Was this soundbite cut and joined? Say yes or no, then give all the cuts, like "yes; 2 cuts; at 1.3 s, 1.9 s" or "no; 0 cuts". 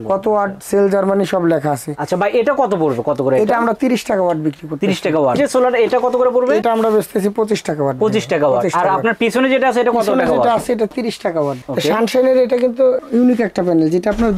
yes; 2 cuts; at 5.4 s, 11.6 s